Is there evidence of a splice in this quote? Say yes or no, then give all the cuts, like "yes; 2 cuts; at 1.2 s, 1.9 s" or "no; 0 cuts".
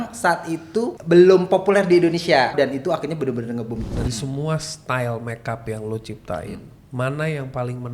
yes; 3 cuts; at 0.9 s, 2.5 s, 3.8 s